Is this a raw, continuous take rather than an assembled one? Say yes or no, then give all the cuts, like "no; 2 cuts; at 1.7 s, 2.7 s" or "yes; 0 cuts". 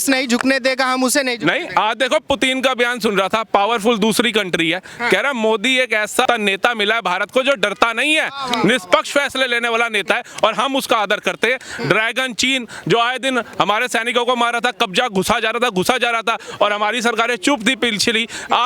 no; 1 cut; at 6.2 s